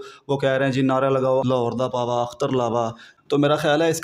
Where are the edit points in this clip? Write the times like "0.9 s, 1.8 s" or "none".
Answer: 1.4 s, 3.0 s